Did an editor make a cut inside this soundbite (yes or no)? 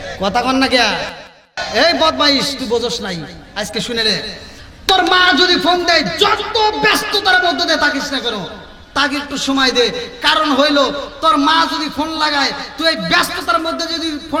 no